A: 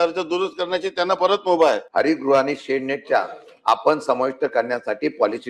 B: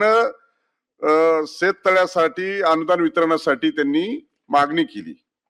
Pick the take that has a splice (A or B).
A